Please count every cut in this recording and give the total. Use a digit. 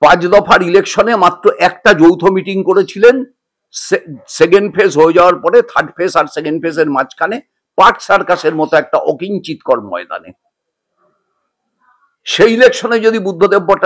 0